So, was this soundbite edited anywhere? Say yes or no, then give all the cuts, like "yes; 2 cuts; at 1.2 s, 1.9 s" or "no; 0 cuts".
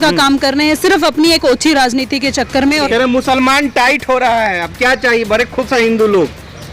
yes; 1 cut; at 2.8 s